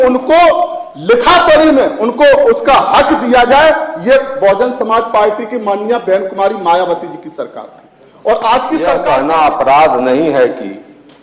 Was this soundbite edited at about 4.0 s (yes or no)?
no